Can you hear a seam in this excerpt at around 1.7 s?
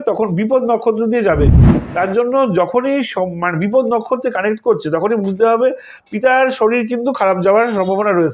yes; 1 cut; at 1.7 s

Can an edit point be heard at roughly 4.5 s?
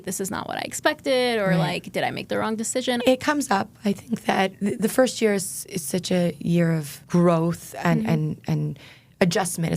yes; 3 cuts; at 3.0 s, 4.5 s, 6.9 s

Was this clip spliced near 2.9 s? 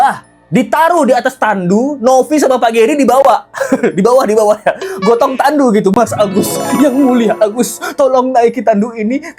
no; 0 cuts

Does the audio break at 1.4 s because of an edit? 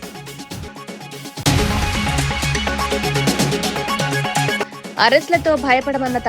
yes; 2 cuts; at 1.4 s, 4.5 s

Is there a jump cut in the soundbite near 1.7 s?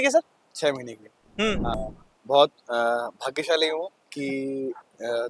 yes; 1 cut; at 1.7 s

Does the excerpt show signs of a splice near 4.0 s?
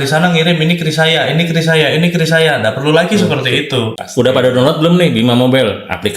yes; 1 cut; at 4.0 s

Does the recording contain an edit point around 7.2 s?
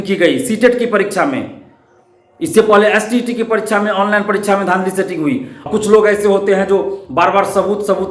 no; 1 cut; at 5.7 s

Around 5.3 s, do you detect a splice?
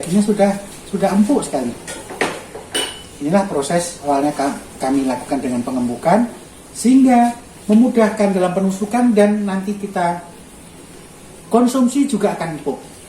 no; 1 cut; at 4.1 s

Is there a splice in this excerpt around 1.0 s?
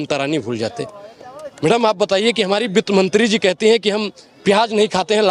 no; 0 cuts

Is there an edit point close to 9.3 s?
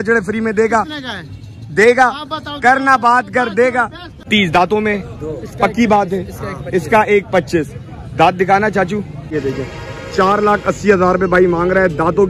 yes; 2 cuts; at 4.2 s, 9.3 s

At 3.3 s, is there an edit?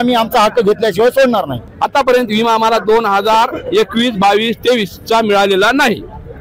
no; 1 cut; at 1.6 s

